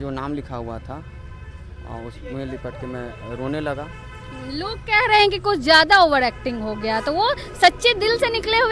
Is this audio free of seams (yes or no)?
yes